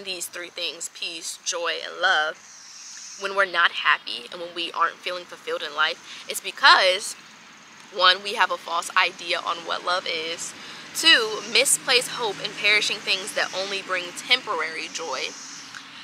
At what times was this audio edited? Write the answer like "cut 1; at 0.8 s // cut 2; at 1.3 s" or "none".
none